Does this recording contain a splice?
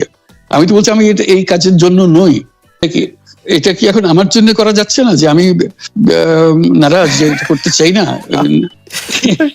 yes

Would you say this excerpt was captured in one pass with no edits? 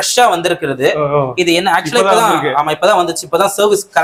yes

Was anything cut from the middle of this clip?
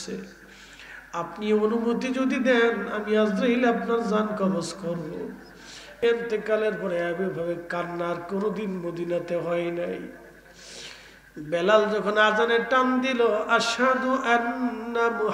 yes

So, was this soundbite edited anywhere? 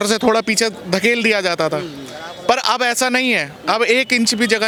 no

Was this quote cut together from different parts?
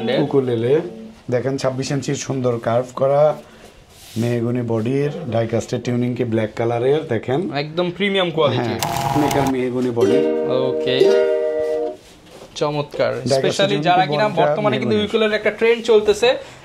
yes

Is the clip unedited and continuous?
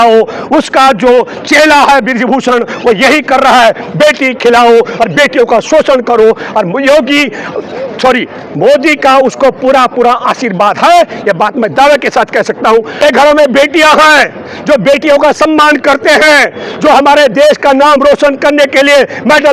no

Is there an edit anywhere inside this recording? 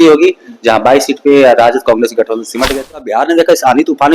yes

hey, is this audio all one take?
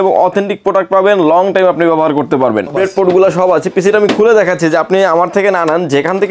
no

